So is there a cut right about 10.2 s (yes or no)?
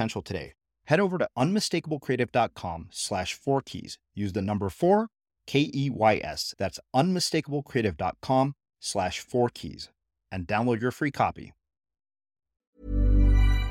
no